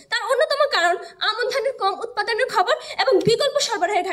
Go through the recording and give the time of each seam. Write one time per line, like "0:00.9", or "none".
none